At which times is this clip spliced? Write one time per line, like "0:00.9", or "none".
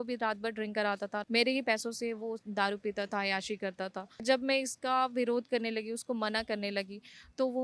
0:01.2
0:04.2